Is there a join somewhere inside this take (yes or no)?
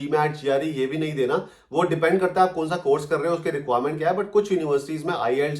no